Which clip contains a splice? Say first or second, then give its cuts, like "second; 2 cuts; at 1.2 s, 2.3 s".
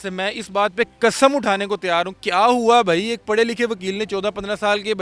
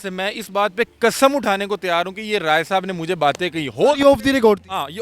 first; 1 cut; at 2.2 s